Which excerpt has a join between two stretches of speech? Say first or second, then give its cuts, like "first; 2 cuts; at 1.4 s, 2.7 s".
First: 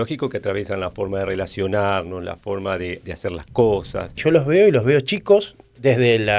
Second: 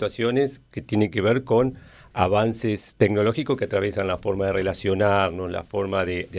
first; 1 cut; at 4.2 s